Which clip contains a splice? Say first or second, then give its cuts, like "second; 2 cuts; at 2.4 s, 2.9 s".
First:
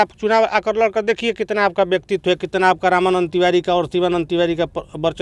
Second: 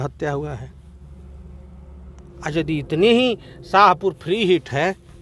second; 1 cut; at 2.3 s